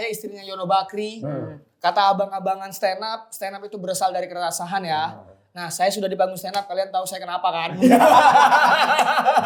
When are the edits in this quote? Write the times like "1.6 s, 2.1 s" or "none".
none